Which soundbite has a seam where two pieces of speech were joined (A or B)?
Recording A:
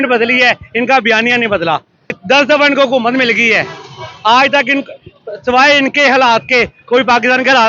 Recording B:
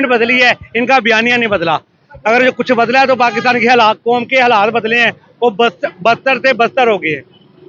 A